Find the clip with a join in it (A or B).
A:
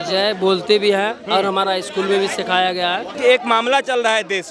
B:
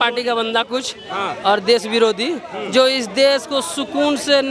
A